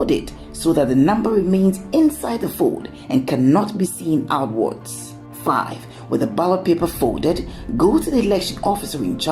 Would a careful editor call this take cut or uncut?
cut